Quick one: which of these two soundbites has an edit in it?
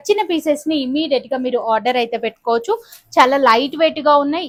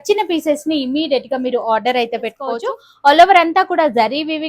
second; 1 cut; at 2.6 s

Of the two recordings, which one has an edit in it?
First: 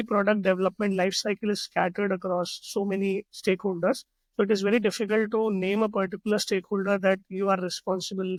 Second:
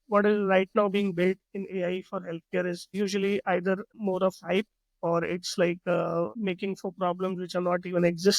second; 3 cuts; at 2.9 s, 3.9 s, 6.3 s

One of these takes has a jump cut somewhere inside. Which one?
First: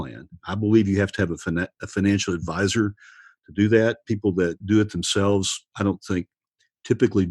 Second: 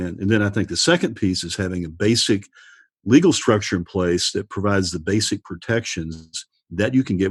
first; 1 cut; at 4.6 s

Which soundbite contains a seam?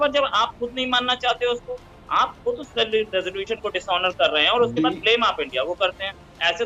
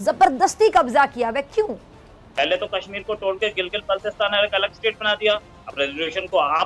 second; 1 cut; at 2.1 s

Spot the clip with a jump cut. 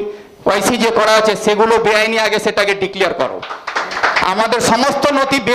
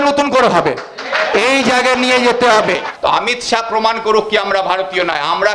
second; 1 cut; at 2.9 s

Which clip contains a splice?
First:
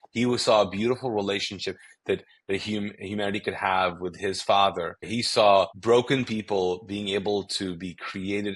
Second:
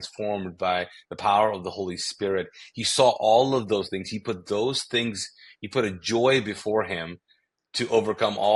first; 2 cuts; at 5.1 s, 5.8 s

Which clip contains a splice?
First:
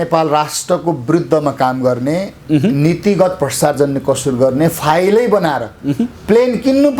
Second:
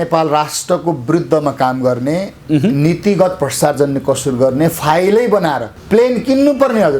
second; 1 cut; at 5.7 s

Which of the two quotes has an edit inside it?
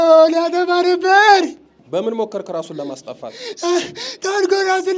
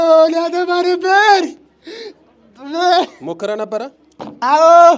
first; 1 cut; at 1.8 s

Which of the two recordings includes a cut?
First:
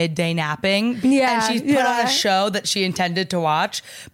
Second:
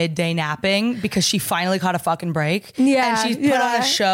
first; 1 cut; at 1.0 s

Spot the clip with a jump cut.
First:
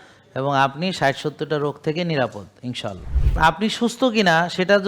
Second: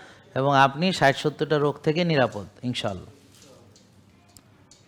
first; 1 cut; at 3.4 s

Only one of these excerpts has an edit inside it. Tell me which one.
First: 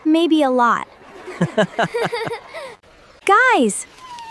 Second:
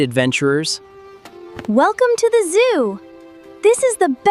first; 1 cut; at 3.2 s

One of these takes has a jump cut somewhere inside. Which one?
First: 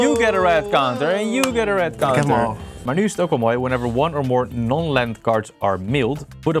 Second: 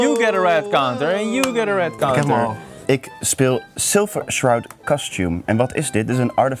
second; 1 cut; at 2.7 s

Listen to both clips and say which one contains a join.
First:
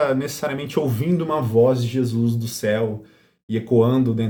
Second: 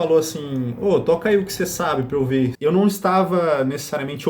second; 1 cut; at 2.6 s

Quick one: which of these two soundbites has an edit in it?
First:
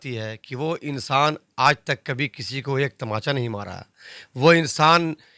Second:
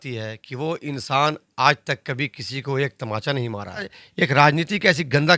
second; 1 cut; at 4.0 s

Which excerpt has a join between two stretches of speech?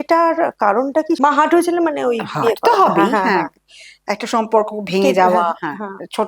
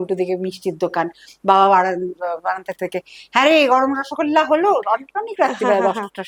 first; 1 cut; at 1.2 s

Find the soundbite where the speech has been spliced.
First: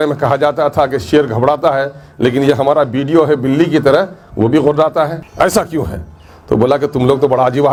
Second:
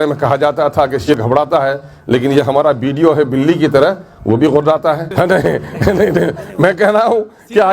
second; 2 cuts; at 1.1 s, 5.1 s

